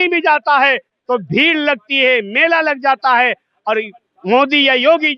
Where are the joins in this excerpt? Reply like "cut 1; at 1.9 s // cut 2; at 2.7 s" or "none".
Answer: none